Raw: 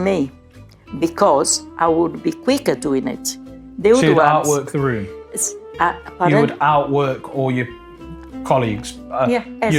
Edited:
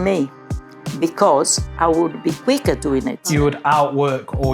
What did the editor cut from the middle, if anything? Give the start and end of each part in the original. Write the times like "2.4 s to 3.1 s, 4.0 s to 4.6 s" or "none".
3.4 s to 6.3 s